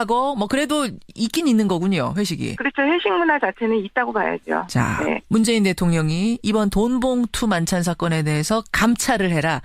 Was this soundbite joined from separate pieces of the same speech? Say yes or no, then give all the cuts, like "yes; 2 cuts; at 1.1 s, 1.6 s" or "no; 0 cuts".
no; 0 cuts